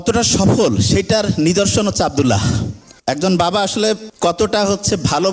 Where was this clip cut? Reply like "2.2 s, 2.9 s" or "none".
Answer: 4.1 s